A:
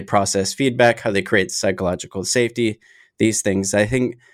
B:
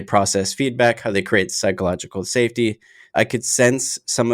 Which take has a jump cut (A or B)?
B